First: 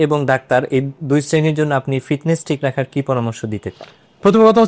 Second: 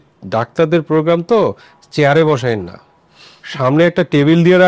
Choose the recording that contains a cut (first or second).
first